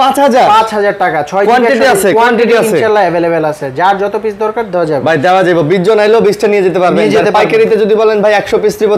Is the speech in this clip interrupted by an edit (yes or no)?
no